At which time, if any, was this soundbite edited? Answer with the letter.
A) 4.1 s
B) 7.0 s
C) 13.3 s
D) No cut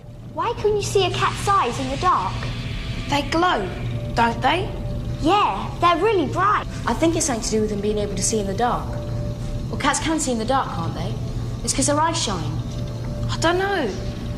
B